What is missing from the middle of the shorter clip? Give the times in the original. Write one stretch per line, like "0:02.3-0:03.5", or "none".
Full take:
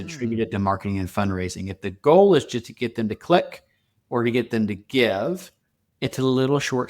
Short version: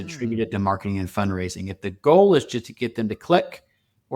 none